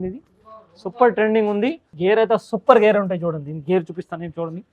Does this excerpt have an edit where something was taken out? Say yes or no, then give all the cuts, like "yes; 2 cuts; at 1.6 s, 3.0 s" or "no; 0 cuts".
yes; 1 cut; at 1.9 s